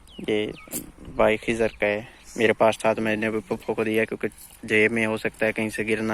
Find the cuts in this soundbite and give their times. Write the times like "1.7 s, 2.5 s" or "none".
none